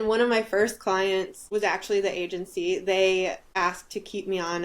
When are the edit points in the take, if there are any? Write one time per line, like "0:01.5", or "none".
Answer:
0:01.4
0:03.4